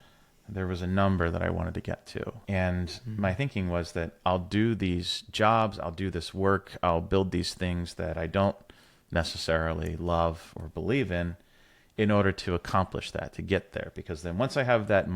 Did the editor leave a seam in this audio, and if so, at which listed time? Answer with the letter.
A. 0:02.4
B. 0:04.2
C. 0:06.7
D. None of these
A